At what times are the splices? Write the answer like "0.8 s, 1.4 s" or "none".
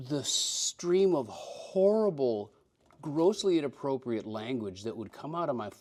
none